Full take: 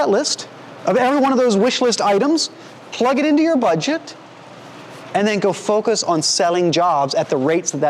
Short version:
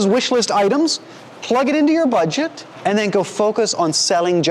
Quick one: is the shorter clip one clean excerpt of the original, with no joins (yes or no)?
no